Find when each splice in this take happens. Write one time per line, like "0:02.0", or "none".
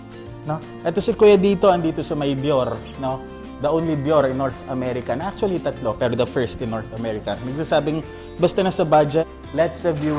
0:09.2